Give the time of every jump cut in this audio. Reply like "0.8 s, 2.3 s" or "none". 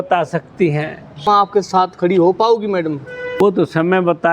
1.2 s, 3.4 s

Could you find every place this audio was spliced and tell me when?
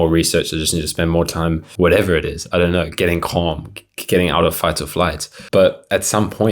1.7 s, 5.3 s

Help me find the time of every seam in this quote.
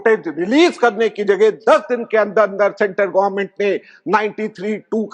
none

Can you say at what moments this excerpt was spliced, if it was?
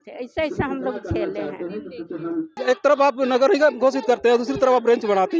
2.5 s

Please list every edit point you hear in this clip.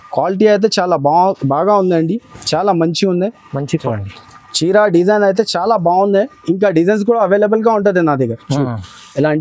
3.8 s

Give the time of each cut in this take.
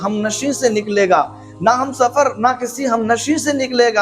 none

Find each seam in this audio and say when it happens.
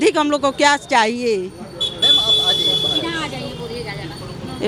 none

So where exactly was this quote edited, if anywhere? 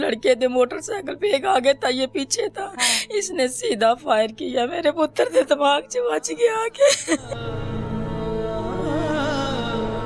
none

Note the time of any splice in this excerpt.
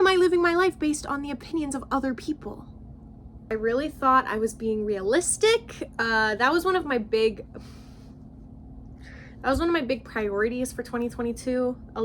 3.5 s

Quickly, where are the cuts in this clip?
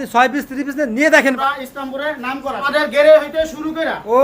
1.4 s, 2.6 s

